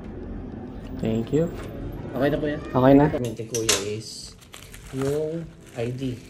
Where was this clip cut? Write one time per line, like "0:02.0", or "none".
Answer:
0:03.4

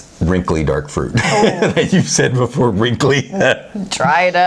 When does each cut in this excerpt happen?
none

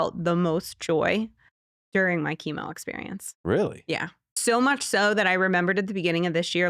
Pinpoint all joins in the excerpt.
0:04.4

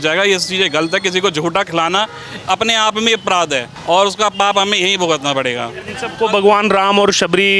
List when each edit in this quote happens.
0:03.7

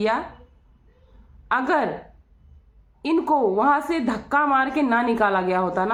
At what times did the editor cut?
none

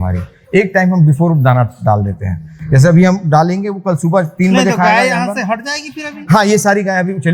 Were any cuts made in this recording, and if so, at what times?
none

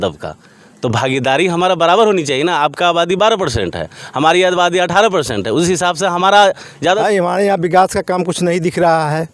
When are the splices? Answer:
0:07.0

